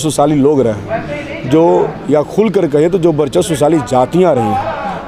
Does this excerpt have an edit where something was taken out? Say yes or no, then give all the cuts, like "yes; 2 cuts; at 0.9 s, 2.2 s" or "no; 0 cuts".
no; 0 cuts